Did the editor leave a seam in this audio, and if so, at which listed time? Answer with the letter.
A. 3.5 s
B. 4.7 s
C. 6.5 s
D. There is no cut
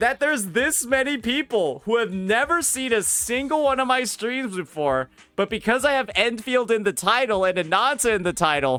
D